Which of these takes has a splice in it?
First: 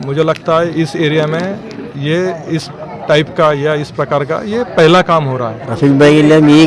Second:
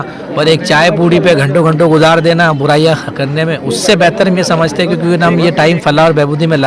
first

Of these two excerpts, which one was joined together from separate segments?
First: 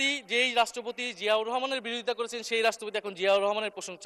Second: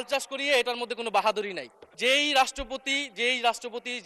second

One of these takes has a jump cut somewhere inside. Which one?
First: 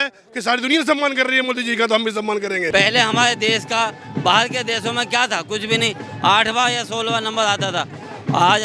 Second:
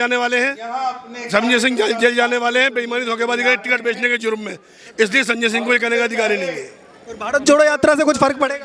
first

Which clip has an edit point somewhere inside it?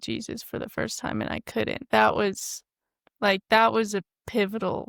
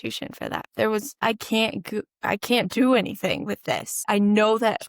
second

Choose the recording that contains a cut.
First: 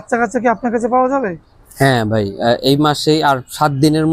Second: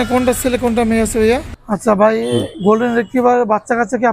second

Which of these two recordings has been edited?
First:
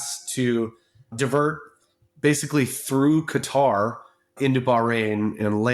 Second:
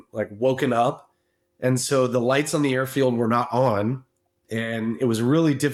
first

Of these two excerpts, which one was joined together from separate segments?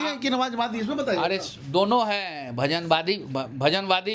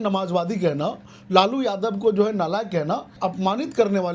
second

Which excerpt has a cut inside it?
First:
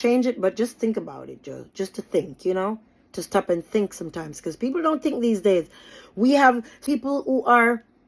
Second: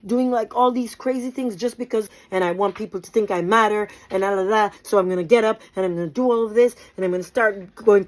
second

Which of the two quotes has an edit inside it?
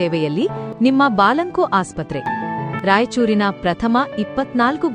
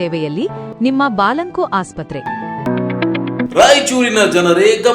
second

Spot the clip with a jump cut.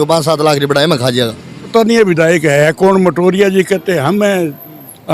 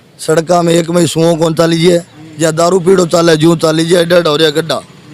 first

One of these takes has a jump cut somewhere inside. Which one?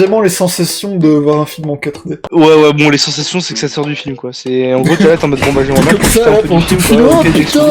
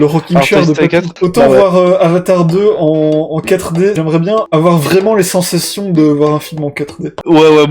second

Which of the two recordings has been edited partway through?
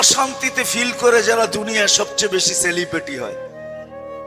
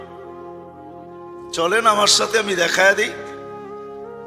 second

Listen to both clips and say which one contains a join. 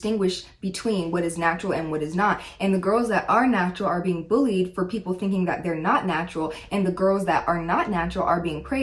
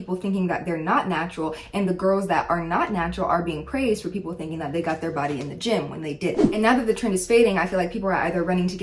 second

